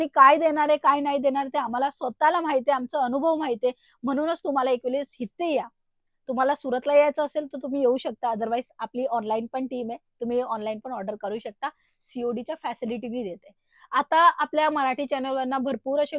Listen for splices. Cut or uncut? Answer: uncut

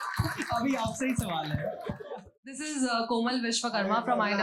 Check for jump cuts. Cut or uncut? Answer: cut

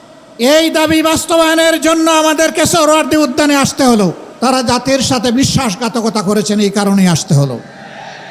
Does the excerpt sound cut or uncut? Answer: cut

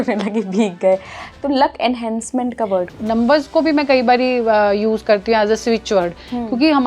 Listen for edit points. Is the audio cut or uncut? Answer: cut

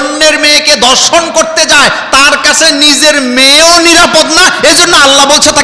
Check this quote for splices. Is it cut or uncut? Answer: uncut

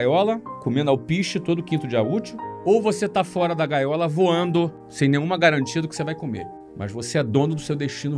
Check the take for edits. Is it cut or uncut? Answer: uncut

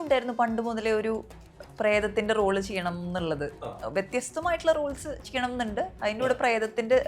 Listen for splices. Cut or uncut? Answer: uncut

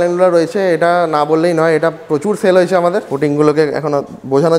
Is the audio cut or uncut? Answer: cut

